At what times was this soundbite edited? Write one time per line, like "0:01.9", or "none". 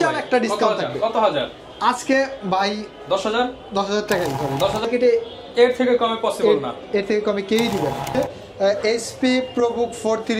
0:04.8
0:08.1